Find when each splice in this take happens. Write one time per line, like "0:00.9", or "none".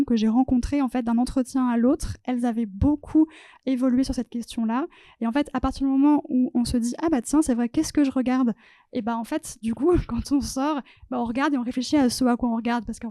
none